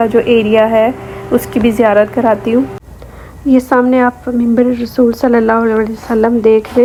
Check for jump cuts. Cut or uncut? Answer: uncut